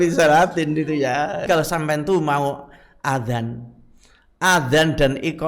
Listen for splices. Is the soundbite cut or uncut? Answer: cut